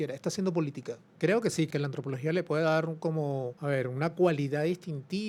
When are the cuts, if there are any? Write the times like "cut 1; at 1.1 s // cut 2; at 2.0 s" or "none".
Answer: cut 1; at 1.1 s // cut 2; at 1.7 s // cut 3; at 3.5 s